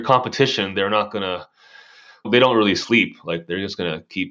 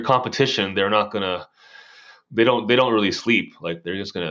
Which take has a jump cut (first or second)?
first